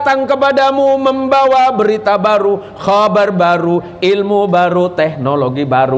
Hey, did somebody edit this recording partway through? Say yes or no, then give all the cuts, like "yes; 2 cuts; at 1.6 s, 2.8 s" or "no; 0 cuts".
no; 0 cuts